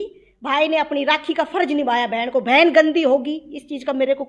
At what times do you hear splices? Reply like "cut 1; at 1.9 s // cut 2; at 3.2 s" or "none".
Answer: none